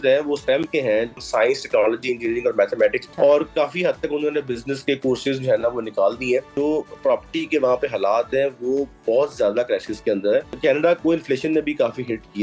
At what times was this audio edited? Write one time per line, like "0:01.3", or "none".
0:01.2
0:03.0
0:06.5
0:10.5